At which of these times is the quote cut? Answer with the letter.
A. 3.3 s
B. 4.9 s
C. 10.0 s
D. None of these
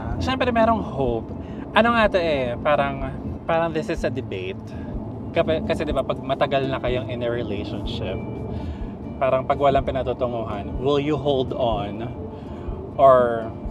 A